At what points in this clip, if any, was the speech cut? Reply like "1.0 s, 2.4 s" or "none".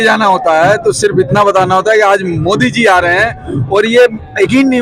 none